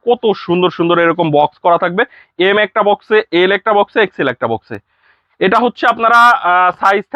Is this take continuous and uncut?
yes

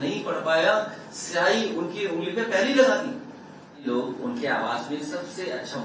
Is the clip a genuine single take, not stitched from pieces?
no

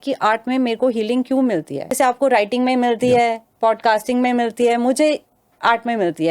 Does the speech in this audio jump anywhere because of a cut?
yes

